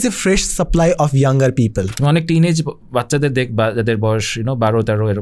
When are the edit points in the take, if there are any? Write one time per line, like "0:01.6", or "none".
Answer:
0:01.9